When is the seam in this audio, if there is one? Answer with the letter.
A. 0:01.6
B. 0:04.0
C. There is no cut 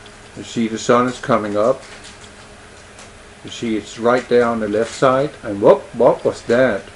B